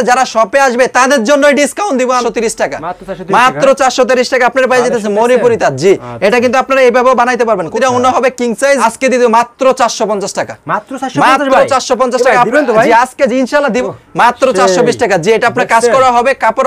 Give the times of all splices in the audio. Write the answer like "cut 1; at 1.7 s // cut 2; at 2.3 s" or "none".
cut 1; at 2.2 s // cut 2; at 7.8 s // cut 3; at 8.8 s // cut 4; at 13.8 s